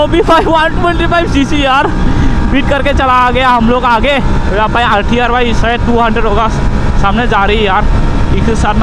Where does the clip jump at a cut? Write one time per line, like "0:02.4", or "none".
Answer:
none